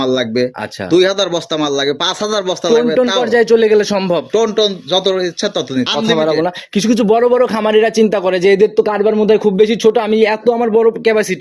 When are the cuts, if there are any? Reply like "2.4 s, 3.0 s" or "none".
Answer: 5.9 s